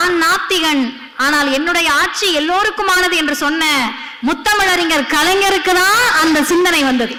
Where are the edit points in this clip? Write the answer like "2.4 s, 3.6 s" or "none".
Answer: none